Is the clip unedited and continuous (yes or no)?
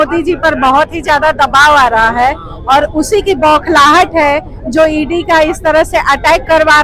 yes